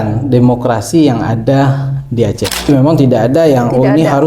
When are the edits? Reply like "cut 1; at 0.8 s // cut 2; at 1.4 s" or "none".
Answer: cut 1; at 2.5 s